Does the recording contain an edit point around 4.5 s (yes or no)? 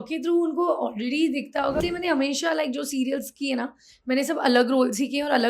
no